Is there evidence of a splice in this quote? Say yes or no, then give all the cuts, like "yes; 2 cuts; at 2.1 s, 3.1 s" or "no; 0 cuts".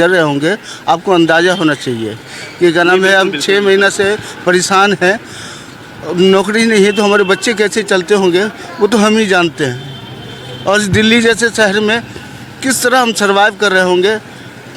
no; 0 cuts